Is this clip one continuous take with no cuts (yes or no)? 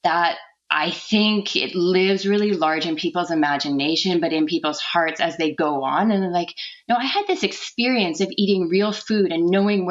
yes